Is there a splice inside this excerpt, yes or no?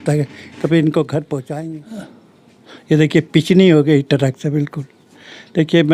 yes